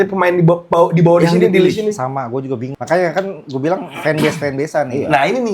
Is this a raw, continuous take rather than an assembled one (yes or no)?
no